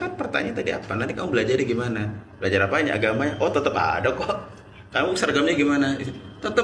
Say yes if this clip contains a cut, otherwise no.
no